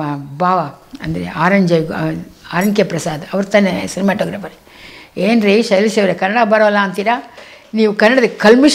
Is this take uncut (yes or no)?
yes